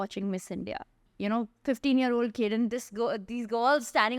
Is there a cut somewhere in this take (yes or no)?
yes